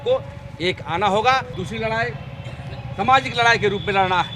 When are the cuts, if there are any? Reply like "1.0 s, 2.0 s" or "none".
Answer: 1.5 s